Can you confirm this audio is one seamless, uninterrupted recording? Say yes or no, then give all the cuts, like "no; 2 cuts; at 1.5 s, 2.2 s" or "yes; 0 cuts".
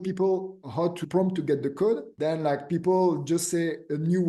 no; 2 cuts; at 1.0 s, 2.1 s